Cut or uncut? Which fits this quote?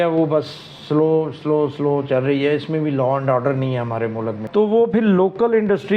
cut